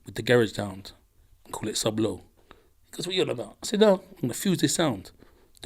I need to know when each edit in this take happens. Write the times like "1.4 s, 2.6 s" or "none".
none